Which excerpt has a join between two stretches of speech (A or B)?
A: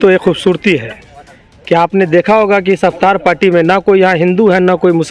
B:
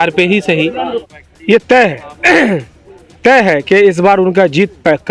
B